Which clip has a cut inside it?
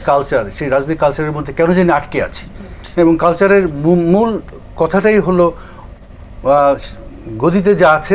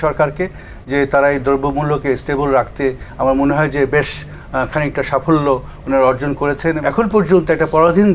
second; 1 cut; at 6.8 s

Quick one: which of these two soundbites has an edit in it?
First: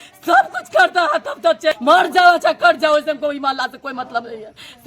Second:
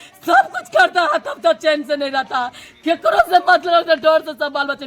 first; 1 cut; at 1.7 s

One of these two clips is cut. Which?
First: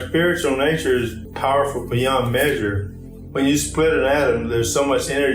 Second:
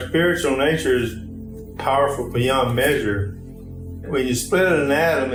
first; 2 cuts; at 1.2 s, 3.2 s

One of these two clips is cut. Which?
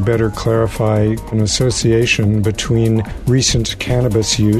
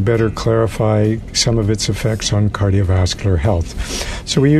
first; 2 cuts; at 1.3 s, 3.1 s

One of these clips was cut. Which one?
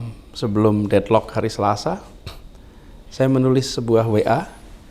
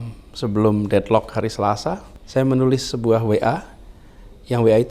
second; 1 cut; at 2.1 s

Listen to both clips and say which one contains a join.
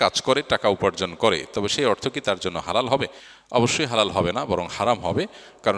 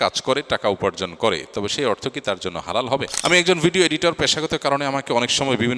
second; 1 cut; at 3.1 s

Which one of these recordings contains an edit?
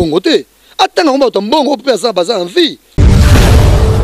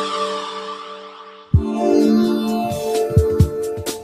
first; 1 cut; at 2.8 s

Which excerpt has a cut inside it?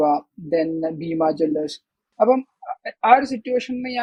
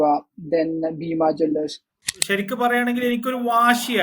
second; 1 cut; at 2.0 s

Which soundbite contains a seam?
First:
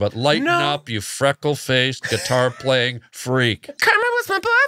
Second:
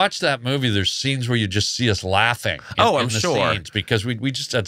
first; 1 cut; at 3.7 s

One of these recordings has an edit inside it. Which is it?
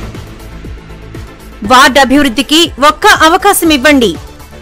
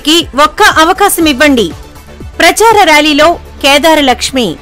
first; 1 cut; at 1.4 s

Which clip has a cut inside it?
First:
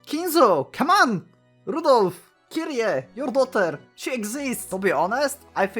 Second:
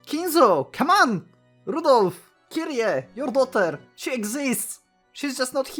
first; 1 cut; at 4.6 s

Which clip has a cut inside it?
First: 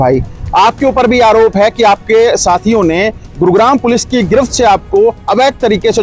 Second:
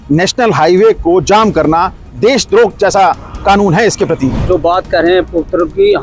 second; 1 cut; at 4.4 s

